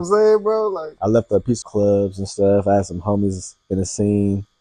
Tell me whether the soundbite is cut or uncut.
cut